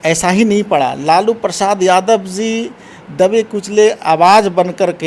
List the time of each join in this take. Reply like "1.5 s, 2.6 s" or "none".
none